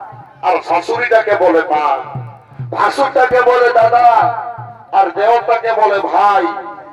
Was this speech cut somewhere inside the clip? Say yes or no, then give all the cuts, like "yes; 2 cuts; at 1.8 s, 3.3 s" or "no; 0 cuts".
no; 0 cuts